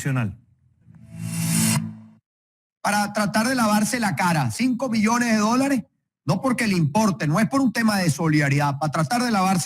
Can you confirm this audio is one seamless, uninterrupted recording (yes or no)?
no